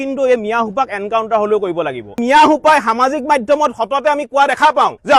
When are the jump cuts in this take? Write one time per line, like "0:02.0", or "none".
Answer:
0:02.2